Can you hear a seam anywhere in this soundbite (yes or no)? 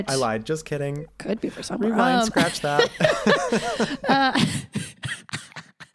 no